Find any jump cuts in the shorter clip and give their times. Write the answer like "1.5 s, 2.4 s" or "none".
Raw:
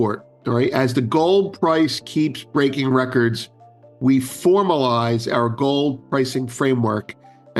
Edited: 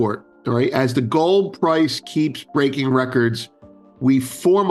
none